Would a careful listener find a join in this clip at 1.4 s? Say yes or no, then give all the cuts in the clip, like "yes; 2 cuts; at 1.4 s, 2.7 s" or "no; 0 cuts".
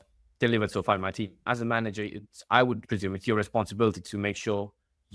yes; 2 cuts; at 1.4 s, 2.8 s